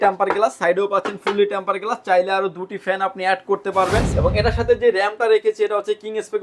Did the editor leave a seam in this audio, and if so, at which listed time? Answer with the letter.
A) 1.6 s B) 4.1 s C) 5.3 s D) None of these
B